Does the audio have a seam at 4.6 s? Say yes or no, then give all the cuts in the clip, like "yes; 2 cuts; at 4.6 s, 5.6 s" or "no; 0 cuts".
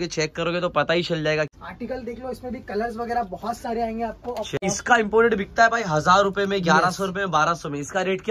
yes; 2 cuts; at 1.5 s, 4.6 s